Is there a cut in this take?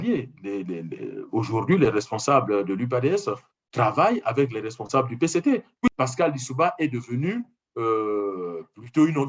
yes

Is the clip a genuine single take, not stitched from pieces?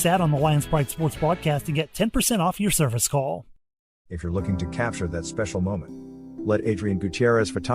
no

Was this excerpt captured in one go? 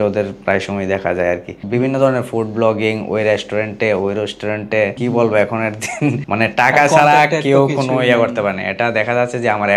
no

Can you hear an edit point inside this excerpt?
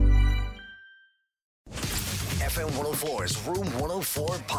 yes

